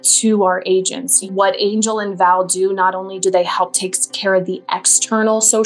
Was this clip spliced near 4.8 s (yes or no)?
no